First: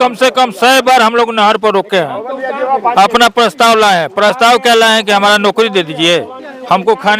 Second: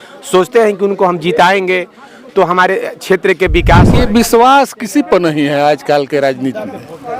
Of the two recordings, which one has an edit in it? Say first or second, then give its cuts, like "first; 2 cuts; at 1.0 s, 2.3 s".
second; 1 cut; at 4.0 s